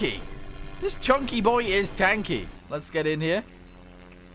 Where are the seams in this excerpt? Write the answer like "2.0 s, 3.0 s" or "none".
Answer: 2.6 s

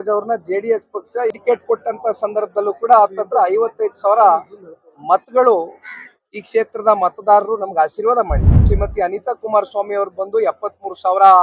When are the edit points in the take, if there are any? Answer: 1.3 s, 8.7 s

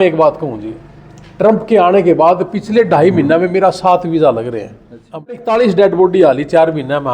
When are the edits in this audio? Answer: 5.4 s

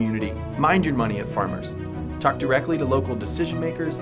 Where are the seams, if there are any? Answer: none

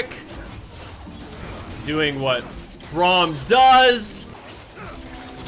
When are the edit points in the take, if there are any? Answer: 4.3 s

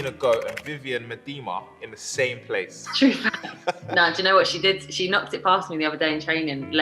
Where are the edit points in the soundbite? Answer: 2.8 s, 3.8 s

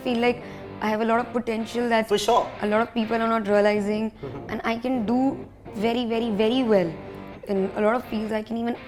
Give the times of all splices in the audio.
none

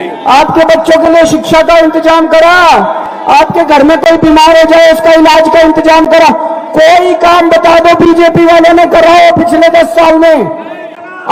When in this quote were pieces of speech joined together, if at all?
none

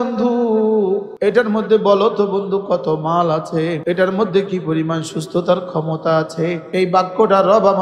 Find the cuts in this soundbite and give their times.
1.1 s, 3.8 s, 6.6 s

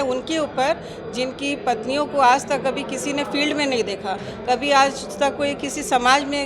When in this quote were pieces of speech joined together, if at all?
none

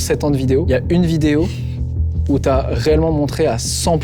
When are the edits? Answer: none

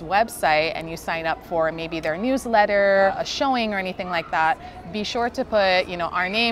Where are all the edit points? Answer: 3.1 s

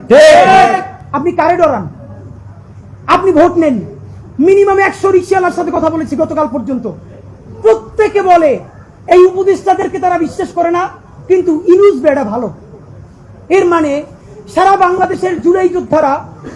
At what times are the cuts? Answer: none

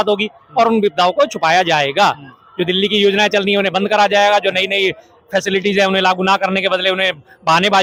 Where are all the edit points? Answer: none

